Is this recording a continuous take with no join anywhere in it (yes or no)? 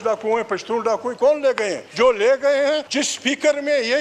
no